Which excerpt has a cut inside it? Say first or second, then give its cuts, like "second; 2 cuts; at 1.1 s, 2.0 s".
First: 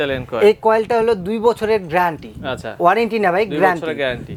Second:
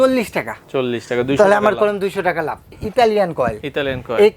second; 1 cut; at 2.7 s